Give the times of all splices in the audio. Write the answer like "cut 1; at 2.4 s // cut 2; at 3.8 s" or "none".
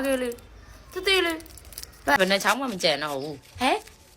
cut 1; at 2.2 s